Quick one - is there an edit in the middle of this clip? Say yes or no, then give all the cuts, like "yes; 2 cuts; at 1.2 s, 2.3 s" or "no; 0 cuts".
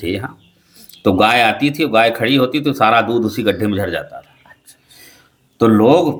no; 0 cuts